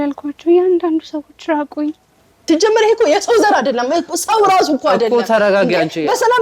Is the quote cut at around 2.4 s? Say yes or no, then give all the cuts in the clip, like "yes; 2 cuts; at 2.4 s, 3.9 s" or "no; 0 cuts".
yes; 1 cut; at 2.4 s